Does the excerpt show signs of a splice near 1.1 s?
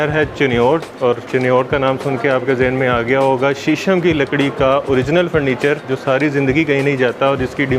yes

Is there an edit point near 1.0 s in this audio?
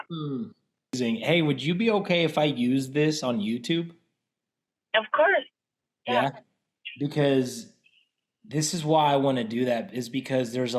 yes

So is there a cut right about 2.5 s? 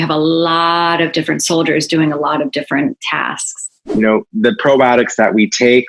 no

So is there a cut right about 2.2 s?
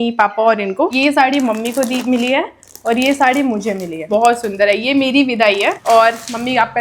no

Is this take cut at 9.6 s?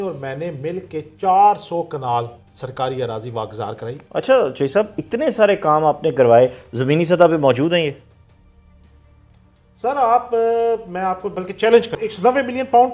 no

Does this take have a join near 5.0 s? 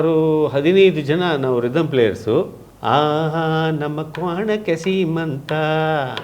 no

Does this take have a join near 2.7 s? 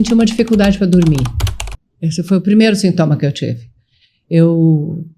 no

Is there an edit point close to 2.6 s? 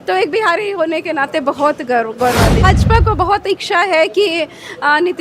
yes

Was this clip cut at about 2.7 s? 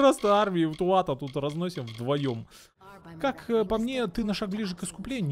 yes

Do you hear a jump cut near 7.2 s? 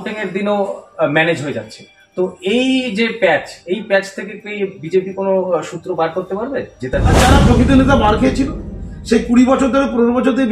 yes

